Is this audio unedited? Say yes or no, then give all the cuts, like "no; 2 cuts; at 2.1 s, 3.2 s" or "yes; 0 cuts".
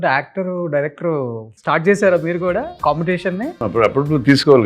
no; 3 cuts; at 1.5 s, 2.7 s, 3.6 s